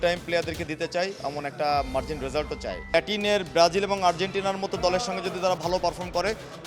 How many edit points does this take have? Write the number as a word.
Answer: one